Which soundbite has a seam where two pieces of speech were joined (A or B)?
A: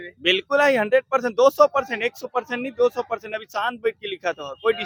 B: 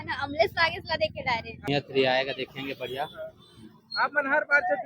B